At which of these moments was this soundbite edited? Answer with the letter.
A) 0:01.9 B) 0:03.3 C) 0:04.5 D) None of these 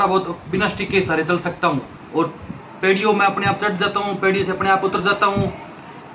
A